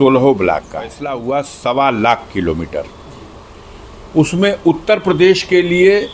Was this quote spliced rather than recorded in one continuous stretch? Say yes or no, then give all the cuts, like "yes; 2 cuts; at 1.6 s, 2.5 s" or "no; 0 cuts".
yes; 1 cut; at 1.1 s